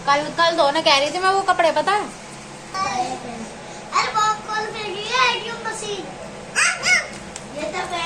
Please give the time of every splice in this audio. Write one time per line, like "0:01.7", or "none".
0:02.7